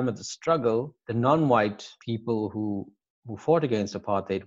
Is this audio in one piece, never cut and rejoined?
no; 2 cuts; at 1.0 s, 1.9 s

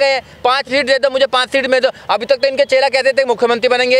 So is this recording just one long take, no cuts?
yes; 0 cuts

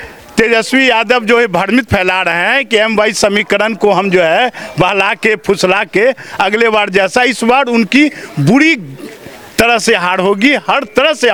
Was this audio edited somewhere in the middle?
no; 0 cuts

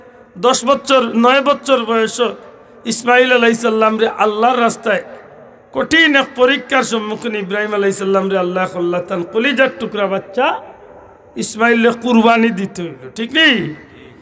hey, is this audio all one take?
yes; 0 cuts

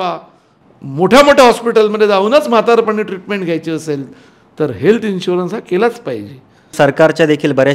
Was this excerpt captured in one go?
no; 1 cut; at 6.7 s

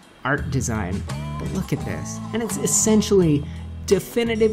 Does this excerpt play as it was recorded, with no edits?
no; 1 cut; at 1.4 s

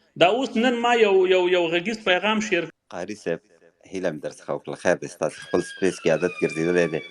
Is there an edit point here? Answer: yes; 1 cut; at 2.7 s

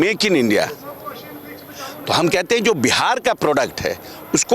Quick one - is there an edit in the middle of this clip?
no; 0 cuts

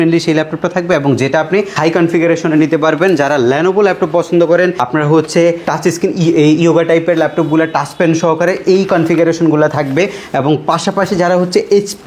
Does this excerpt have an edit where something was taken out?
no; 0 cuts

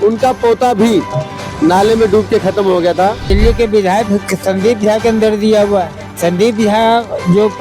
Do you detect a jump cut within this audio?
yes; 2 cuts; at 3.2 s, 6.0 s

